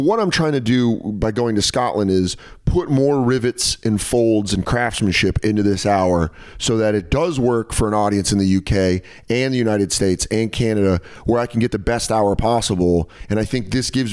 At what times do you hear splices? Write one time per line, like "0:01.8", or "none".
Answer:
0:13.1

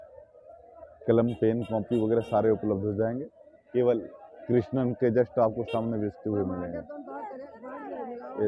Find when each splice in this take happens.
none

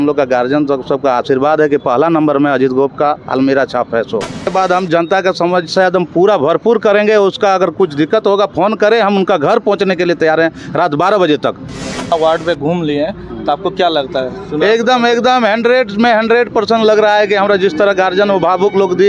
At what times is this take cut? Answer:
0:04.5
0:12.1

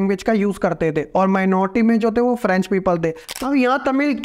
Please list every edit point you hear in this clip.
0:03.3

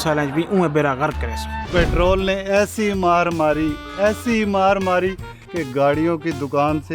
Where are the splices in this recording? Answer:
0:01.6

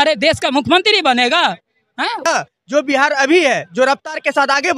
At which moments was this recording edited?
0:02.2

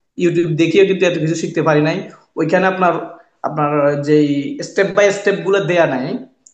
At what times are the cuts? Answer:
none

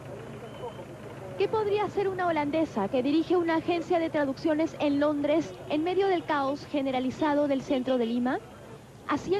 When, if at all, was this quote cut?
0:08.4

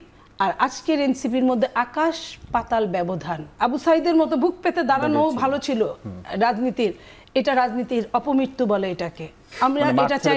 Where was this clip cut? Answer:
0:03.4

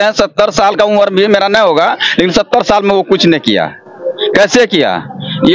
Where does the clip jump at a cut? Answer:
none

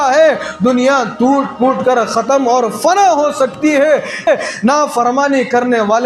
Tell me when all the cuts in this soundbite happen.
0:04.3

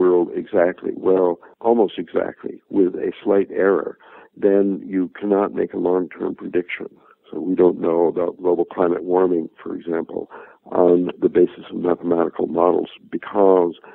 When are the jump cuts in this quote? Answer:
0:01.5

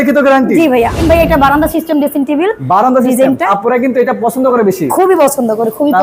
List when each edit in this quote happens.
0:01.0
0:03.4

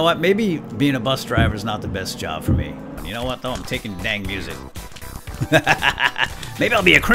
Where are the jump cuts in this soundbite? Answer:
0:03.0

